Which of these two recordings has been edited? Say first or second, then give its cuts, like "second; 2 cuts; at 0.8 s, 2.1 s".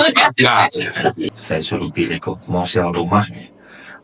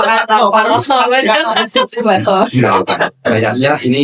first; 1 cut; at 1.4 s